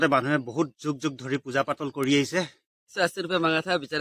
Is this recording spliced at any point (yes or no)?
yes